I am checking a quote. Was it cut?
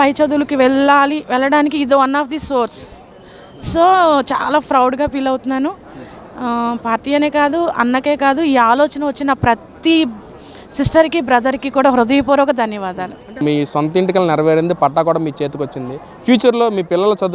yes; 1 cut; at 13.4 s

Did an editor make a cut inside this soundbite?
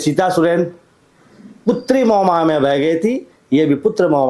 no; 0 cuts

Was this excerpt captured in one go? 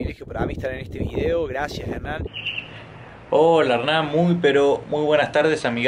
no; 1 cut; at 2.3 s

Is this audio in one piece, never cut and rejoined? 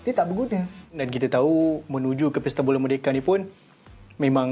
no; 1 cut; at 1.0 s

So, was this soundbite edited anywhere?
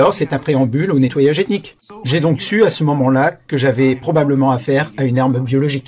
yes; 1 cut; at 1.8 s

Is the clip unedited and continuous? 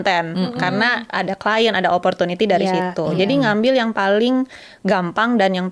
yes; 0 cuts

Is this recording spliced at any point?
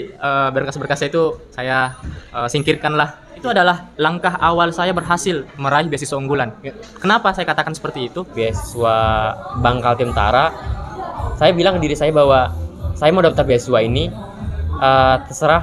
yes; 2 cuts; at 3.4 s, 8.3 s

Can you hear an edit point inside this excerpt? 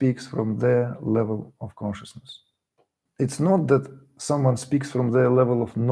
yes; 1 cut; at 3.0 s

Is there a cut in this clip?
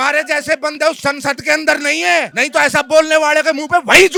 no; 0 cuts

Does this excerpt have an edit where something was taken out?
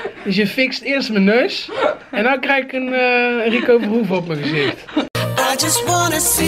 yes; 1 cut; at 5.1 s

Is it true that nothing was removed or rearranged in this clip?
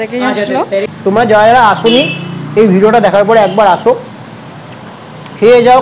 no; 1 cut; at 1.1 s

